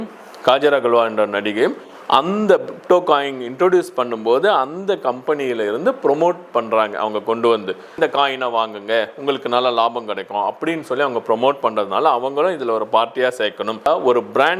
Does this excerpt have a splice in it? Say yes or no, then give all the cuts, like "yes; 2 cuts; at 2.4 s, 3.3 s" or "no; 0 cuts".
yes; 2 cuts; at 7.9 s, 13.9 s